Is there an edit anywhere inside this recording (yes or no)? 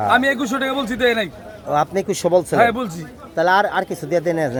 no